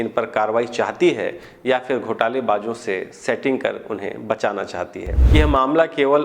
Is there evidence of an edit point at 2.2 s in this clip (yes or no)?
no